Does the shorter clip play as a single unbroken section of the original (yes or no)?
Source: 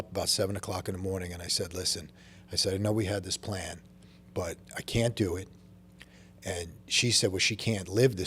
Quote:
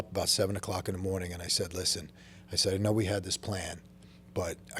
yes